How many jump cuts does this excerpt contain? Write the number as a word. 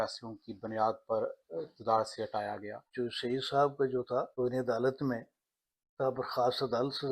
two